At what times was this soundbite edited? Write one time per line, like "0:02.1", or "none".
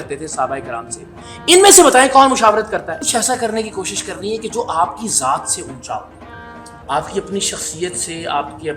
0:02.9